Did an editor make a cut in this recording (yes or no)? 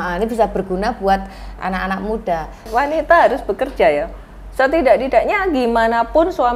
yes